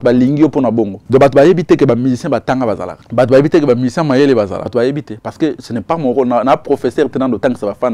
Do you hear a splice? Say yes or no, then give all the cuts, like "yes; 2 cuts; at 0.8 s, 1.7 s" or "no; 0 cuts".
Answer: yes; 3 cuts; at 1.0 s, 2.9 s, 4.6 s